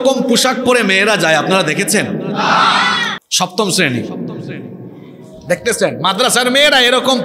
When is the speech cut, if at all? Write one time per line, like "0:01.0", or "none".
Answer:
0:03.2